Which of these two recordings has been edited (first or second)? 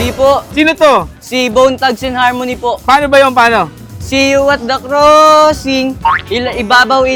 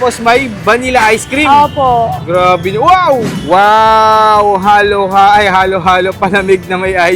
second